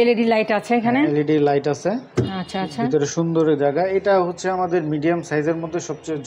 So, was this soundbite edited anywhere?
no; 0 cuts

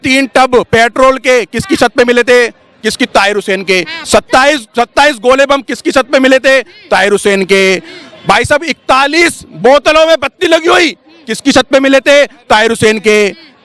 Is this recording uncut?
yes; 0 cuts

